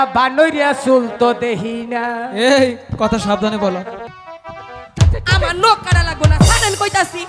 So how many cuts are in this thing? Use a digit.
1